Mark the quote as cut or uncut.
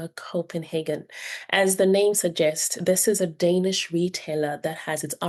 uncut